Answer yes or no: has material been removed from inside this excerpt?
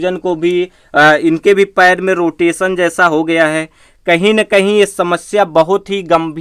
no